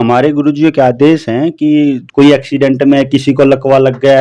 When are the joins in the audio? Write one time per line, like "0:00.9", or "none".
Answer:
0:02.0